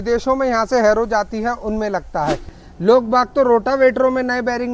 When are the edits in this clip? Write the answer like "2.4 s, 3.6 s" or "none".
2.5 s